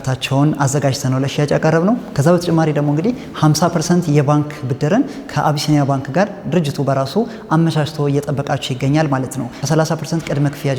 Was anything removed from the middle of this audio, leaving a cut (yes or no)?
yes